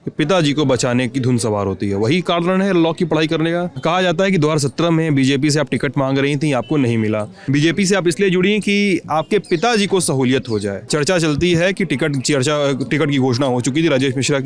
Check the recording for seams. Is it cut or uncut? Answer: cut